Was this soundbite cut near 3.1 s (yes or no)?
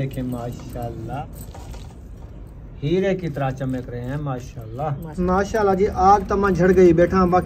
no